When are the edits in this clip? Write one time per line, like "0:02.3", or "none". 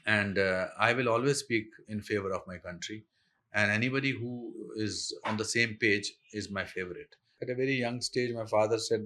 0:07.3